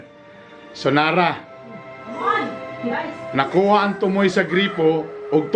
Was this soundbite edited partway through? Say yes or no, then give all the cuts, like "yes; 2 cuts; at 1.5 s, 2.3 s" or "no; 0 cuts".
no; 0 cuts